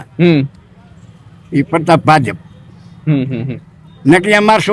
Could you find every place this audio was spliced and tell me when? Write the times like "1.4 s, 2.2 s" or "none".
none